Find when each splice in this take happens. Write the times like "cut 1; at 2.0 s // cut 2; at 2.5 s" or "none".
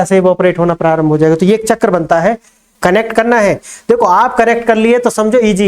cut 1; at 2.6 s